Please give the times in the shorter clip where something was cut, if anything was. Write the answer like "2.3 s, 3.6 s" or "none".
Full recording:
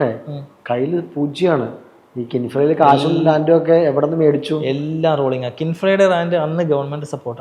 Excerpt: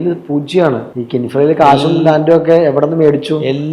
0.9 s